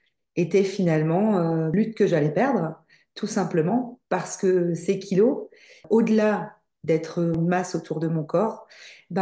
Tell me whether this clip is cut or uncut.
cut